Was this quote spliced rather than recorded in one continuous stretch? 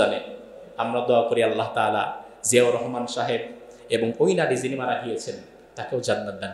no; 0 cuts

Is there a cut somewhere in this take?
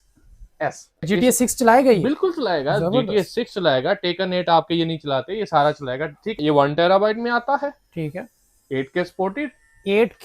yes; 2 cuts; at 1.0 s, 6.4 s

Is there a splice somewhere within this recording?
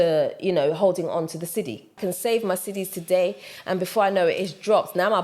yes; 1 cut; at 1.9 s

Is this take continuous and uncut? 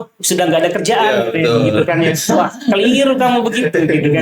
yes; 0 cuts

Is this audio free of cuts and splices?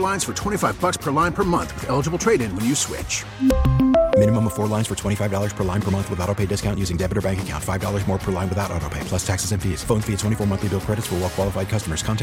yes; 0 cuts

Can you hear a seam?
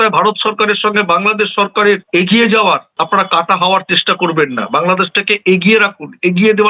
no; 0 cuts

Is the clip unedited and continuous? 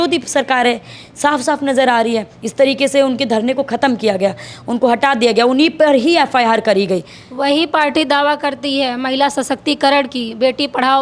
yes; 0 cuts

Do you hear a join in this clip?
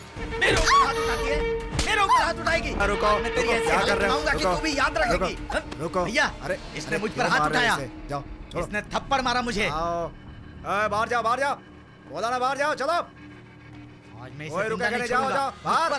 yes; 1 cut; at 2.8 s

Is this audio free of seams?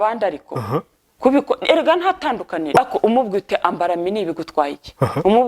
no; 1 cut; at 2.8 s

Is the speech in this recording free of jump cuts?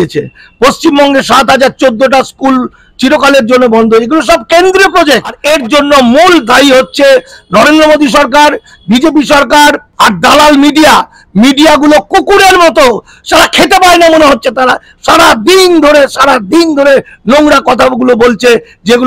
no; 2 cuts; at 5.3 s, 9.9 s

